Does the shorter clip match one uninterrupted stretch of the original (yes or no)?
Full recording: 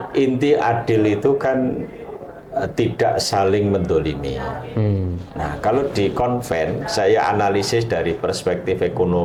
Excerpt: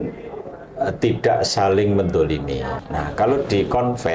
no